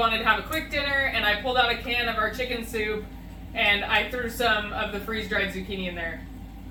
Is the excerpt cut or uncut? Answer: uncut